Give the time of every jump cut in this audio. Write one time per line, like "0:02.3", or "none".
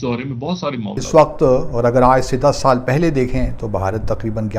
0:01.0